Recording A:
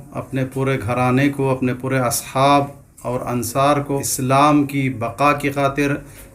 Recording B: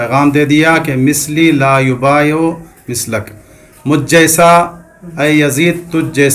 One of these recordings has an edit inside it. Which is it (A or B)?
A